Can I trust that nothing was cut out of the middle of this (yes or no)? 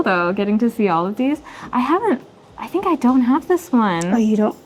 yes